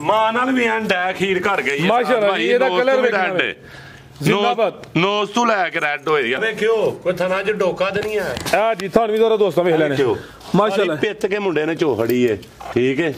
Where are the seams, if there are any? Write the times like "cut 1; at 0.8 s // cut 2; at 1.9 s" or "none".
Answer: cut 1; at 6.4 s